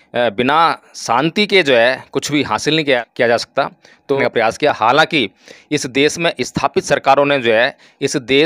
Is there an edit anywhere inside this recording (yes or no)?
yes